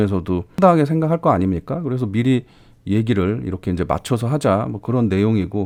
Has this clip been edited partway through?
no; 0 cuts

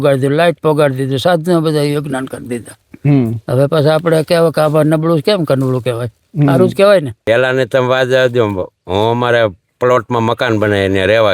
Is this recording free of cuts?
no; 1 cut; at 7.1 s

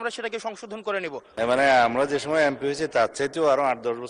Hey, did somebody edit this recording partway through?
yes; 1 cut; at 1.3 s

